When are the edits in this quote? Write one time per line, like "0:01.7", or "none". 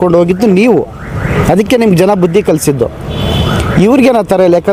none